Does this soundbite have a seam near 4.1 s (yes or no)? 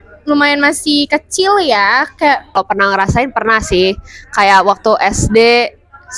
no